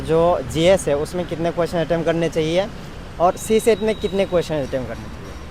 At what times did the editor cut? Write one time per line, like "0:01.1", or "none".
none